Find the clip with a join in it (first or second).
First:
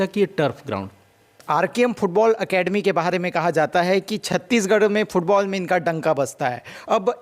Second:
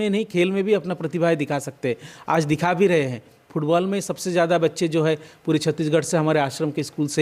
first